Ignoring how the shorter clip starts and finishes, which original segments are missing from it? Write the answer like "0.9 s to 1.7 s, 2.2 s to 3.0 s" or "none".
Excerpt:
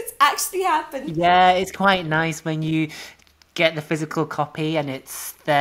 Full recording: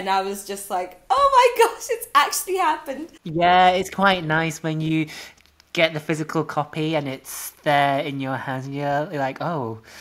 2.9 s to 3.2 s